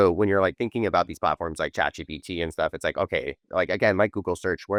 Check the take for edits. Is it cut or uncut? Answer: uncut